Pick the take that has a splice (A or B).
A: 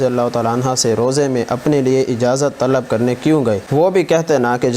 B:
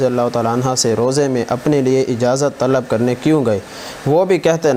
A